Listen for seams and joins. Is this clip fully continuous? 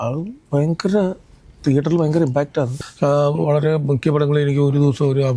no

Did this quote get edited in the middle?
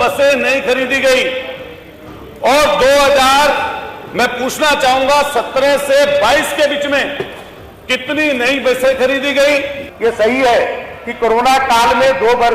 yes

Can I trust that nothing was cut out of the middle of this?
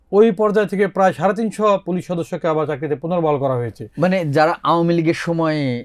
yes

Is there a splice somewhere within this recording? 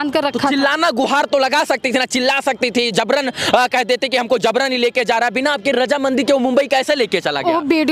no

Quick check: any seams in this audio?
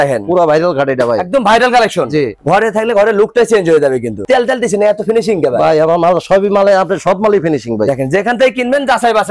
no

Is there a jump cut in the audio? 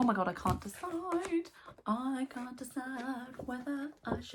no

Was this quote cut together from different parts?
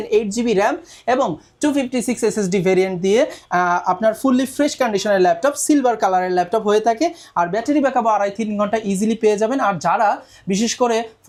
no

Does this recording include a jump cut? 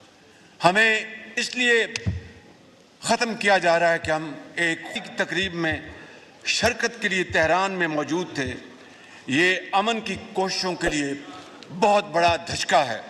yes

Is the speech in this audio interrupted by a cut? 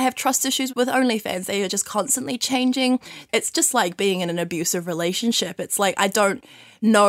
yes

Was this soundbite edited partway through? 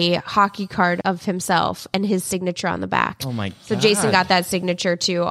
yes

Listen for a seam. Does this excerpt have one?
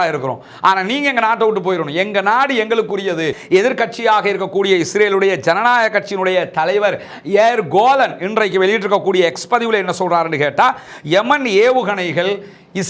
yes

